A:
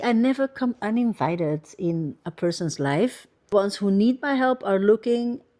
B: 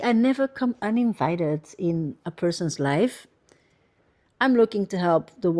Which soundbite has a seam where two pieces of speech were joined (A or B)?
A